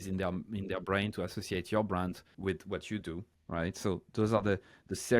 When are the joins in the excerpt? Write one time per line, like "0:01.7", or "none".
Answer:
0:02.3
0:03.3

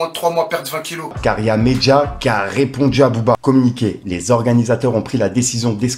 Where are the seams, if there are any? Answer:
0:01.1
0:03.9

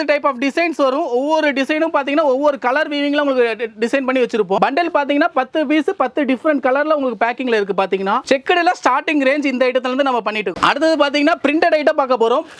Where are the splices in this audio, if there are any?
none

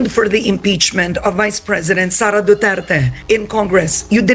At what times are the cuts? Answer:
none

